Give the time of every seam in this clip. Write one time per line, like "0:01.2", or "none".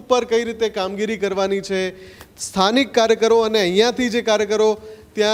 none